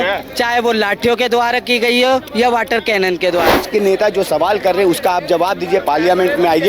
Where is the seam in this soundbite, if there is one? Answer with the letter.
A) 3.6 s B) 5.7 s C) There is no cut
A